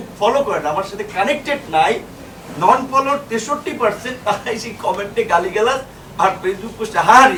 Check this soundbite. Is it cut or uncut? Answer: uncut